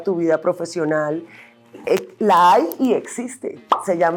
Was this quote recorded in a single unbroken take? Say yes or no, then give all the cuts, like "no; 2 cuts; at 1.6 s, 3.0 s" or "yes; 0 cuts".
yes; 0 cuts